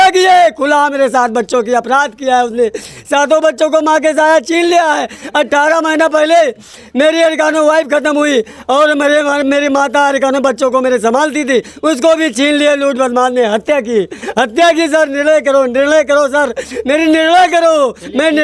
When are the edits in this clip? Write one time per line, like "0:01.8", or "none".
none

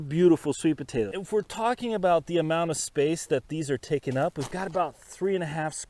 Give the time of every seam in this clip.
0:01.1

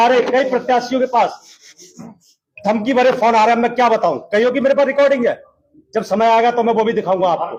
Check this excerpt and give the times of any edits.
none

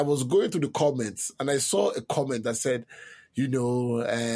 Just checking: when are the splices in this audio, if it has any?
none

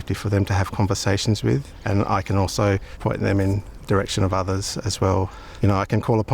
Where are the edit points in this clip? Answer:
0:01.7
0:02.9
0:05.4

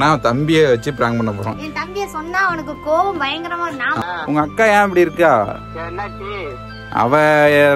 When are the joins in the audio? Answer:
0:03.9
0:05.6

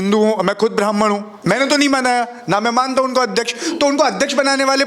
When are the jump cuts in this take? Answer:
none

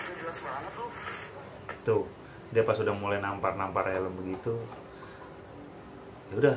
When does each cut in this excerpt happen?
none

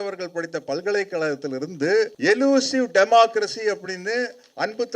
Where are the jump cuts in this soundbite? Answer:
0:02.1

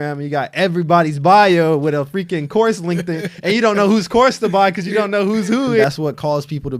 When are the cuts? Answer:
0:05.8

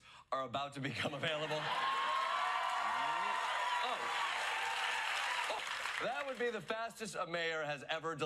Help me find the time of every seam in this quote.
0:05.6

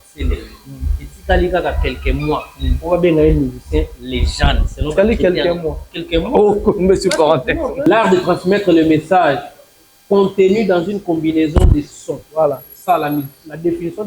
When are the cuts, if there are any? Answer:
0:07.8

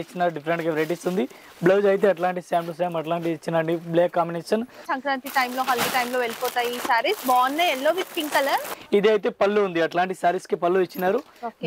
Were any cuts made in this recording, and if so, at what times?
0:04.9
0:08.7

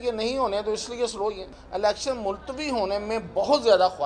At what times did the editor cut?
0:01.4

